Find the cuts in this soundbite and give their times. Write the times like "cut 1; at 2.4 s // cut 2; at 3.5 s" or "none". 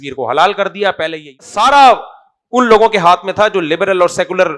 cut 1; at 1.5 s